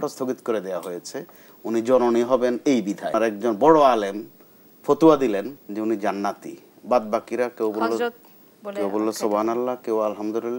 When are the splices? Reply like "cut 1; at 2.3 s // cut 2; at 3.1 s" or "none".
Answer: cut 1; at 3.1 s // cut 2; at 5.6 s

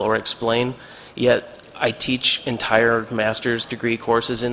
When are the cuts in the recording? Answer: cut 1; at 3.6 s

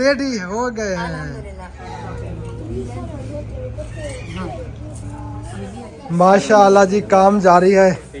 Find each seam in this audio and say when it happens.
cut 1; at 1.9 s // cut 2; at 6.0 s

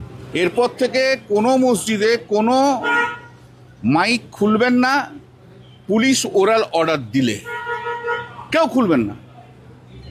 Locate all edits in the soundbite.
none

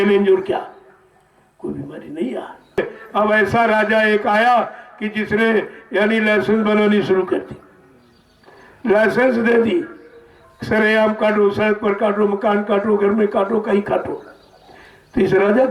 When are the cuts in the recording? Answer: cut 1; at 2.8 s

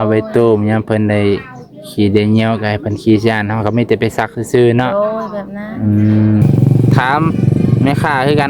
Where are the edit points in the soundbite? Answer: cut 1; at 6.4 s

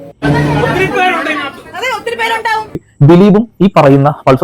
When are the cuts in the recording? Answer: cut 1; at 2.8 s

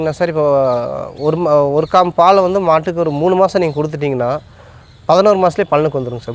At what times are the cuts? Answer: none

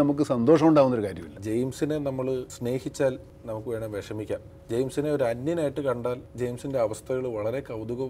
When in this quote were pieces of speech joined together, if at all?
cut 1; at 1.3 s // cut 2; at 2.5 s // cut 3; at 3.3 s // cut 4; at 4.5 s

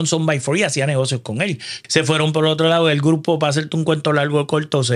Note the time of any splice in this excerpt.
cut 1; at 1.7 s

